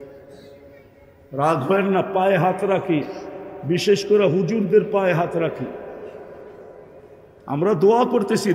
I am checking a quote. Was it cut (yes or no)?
no